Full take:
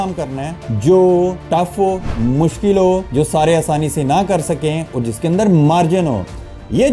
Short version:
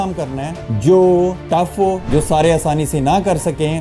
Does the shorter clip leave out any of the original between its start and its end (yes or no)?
yes